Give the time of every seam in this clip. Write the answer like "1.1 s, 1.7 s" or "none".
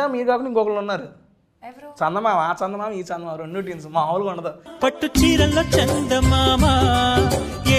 none

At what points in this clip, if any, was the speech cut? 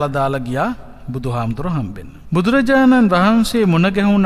2.1 s

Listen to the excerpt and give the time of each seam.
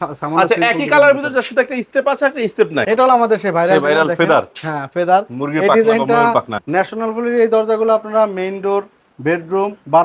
2.9 s, 6.6 s

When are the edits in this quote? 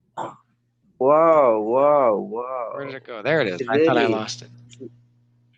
none

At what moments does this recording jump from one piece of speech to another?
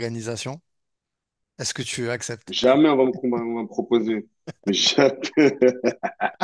none

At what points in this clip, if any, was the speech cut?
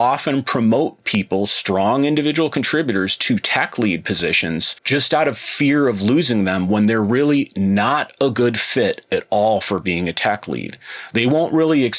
4.7 s

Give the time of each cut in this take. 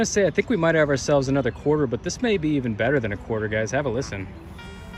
none

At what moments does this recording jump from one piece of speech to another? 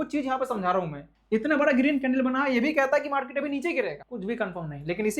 1.1 s, 4.1 s

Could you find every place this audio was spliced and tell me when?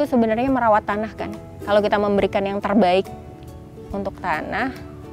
none

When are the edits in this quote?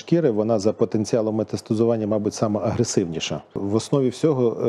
3.5 s

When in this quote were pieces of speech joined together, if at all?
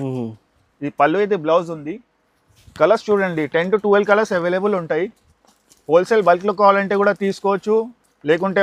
none

